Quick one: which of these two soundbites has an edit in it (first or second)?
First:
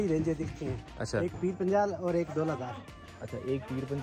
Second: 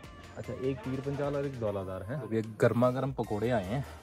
second